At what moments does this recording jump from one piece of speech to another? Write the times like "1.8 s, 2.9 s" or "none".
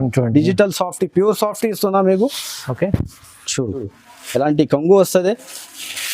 3.8 s